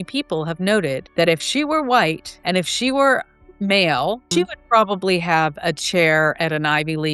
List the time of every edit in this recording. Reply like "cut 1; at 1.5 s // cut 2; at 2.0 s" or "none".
cut 1; at 1.0 s // cut 2; at 2.3 s // cut 3; at 4.2 s